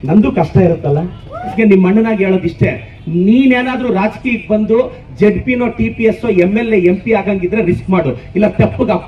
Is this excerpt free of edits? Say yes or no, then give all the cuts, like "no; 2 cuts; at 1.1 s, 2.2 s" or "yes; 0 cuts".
no; 1 cut; at 1.5 s